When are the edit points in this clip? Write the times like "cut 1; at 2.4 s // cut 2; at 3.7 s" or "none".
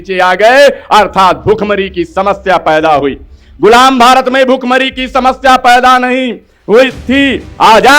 none